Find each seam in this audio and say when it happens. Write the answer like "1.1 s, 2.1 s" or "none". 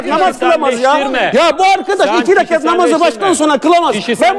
none